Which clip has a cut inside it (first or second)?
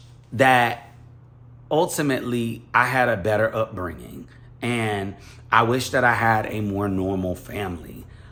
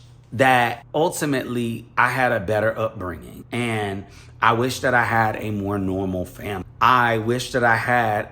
second